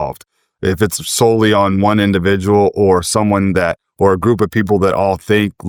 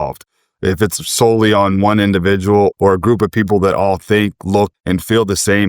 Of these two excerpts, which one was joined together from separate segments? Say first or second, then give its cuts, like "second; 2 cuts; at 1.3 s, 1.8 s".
second; 2 cuts; at 2.7 s, 4.7 s